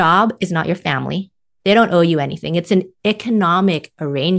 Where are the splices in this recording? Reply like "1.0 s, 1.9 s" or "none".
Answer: none